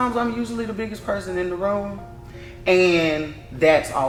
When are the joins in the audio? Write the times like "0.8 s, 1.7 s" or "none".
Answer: none